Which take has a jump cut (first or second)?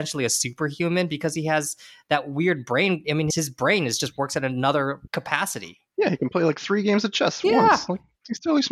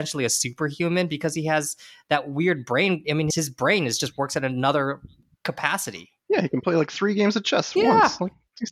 first